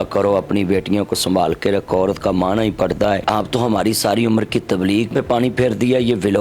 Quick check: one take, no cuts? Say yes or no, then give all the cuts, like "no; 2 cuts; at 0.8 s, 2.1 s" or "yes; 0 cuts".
no; 2 cuts; at 3.2 s, 5.1 s